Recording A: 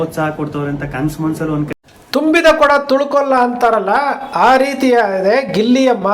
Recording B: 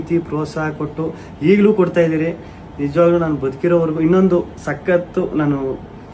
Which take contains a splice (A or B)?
A